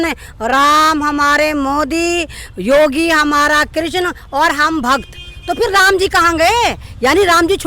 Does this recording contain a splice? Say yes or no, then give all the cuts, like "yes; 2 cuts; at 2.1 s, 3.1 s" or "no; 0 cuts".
no; 0 cuts